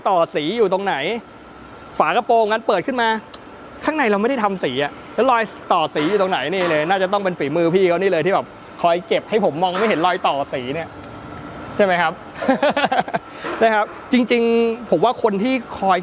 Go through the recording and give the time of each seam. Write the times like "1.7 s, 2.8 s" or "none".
none